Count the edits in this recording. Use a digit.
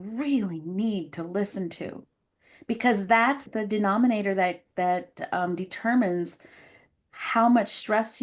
1